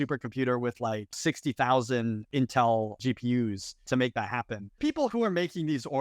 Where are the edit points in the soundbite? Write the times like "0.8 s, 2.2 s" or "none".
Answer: 1.2 s, 2.3 s, 3.2 s, 4.8 s

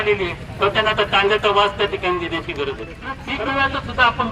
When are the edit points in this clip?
3.2 s

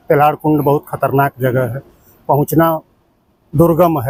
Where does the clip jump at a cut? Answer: none

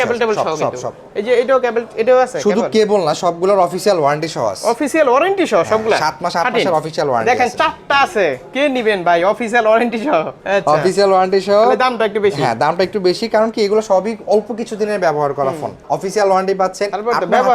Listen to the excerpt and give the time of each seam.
none

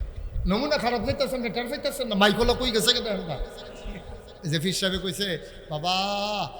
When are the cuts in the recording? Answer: 4.4 s

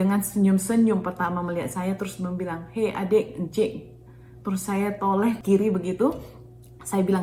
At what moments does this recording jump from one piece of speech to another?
5.4 s

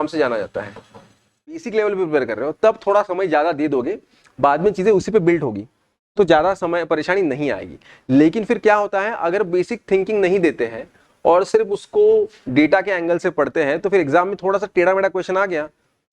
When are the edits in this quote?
1.7 s

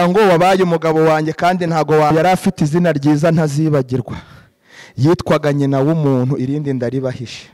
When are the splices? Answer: 2.1 s

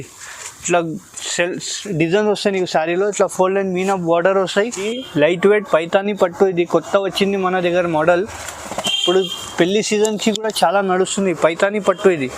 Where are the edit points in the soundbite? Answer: 4.9 s

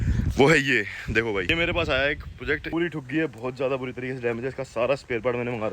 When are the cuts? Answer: 2.7 s

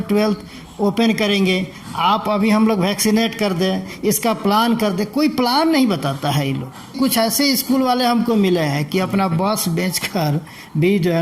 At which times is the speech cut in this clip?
6.9 s

